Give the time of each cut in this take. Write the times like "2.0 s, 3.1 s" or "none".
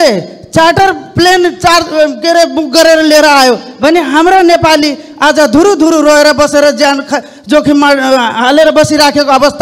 none